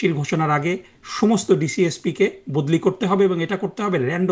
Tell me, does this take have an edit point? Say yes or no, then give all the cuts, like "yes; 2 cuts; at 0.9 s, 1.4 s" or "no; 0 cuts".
no; 0 cuts